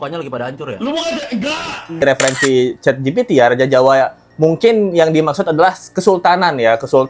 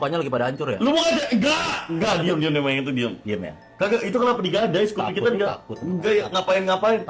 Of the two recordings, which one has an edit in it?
first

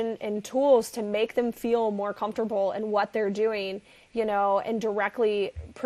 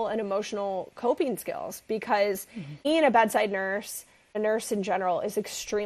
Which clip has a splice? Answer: second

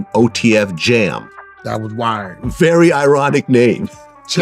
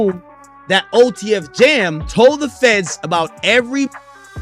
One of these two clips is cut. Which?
second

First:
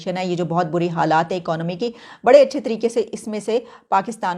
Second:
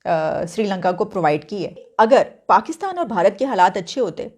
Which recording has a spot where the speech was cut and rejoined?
second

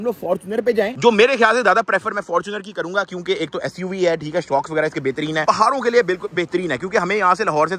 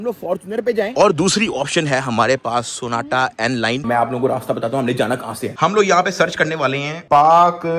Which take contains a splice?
second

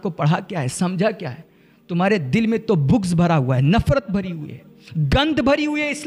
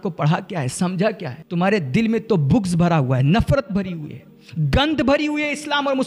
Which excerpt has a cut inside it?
second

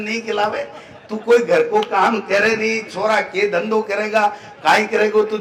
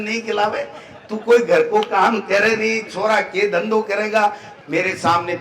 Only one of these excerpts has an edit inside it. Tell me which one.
second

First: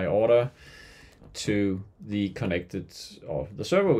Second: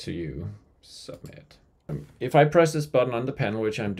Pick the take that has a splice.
second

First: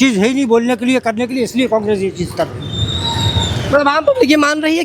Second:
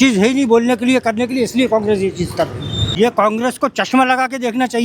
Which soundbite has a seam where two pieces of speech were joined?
second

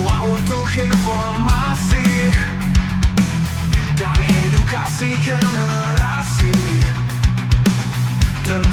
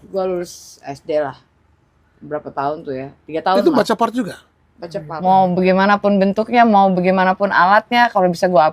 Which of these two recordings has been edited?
second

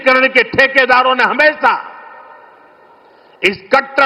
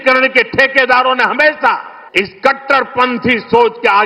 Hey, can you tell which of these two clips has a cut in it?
second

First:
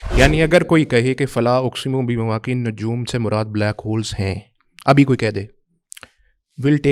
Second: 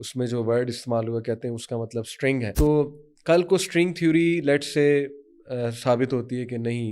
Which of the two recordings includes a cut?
second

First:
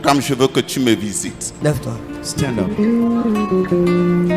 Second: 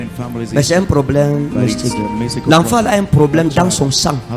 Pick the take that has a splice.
first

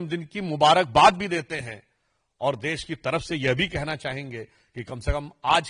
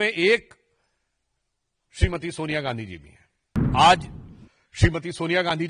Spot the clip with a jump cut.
second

